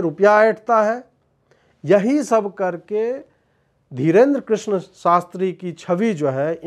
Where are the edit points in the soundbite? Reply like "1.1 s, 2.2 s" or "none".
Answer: none